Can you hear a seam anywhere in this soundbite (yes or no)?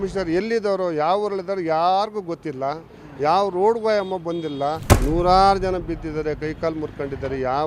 yes